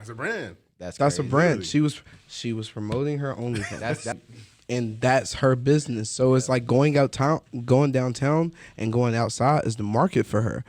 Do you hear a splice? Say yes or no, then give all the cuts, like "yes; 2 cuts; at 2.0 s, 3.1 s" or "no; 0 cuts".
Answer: yes; 1 cut; at 4.2 s